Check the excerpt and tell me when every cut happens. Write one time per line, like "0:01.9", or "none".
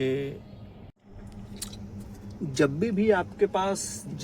0:00.9

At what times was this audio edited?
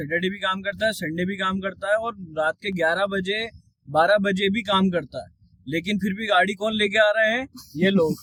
none

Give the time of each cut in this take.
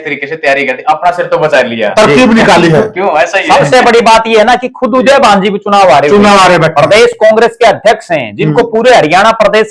none

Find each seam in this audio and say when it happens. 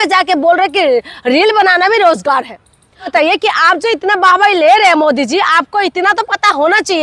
0:03.1

